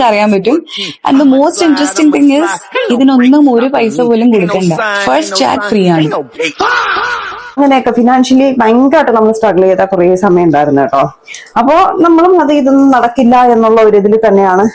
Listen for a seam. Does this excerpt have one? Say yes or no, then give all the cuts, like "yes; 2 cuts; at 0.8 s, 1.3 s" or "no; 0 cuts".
yes; 1 cut; at 7.6 s